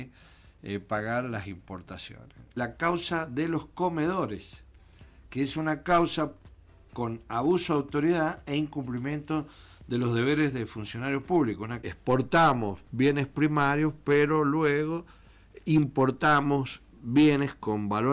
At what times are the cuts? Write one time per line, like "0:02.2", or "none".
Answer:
0:02.5
0:11.8